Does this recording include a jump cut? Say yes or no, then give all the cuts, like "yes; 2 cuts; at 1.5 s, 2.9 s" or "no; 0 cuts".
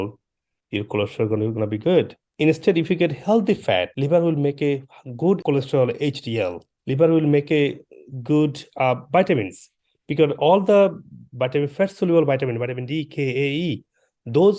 yes; 4 cuts; at 2.2 s, 3.9 s, 5.4 s, 6.7 s